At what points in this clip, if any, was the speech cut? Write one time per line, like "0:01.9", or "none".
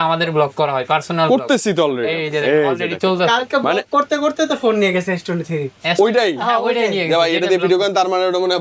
none